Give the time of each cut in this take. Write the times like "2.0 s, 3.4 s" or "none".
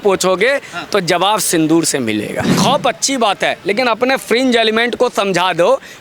2.5 s